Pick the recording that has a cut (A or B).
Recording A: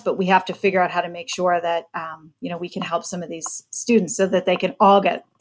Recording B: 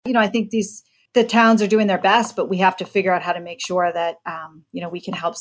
B